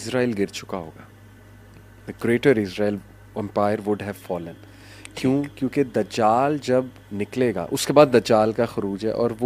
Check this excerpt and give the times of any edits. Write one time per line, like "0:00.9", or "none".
none